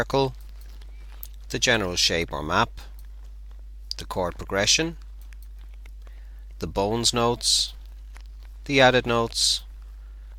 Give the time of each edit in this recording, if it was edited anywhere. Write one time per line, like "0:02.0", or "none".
0:04.5